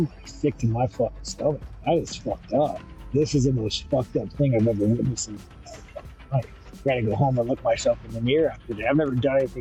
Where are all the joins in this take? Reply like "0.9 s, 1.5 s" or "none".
none